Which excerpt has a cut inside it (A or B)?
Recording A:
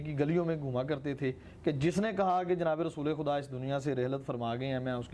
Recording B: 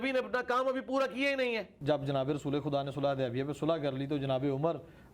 B